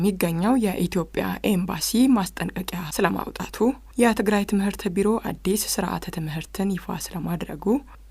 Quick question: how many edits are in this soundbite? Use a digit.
0